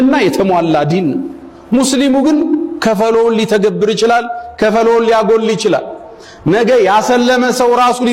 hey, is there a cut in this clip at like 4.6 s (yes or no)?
no